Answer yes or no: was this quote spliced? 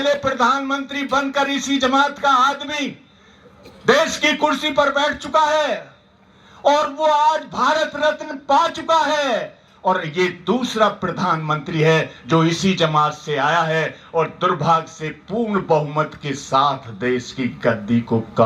no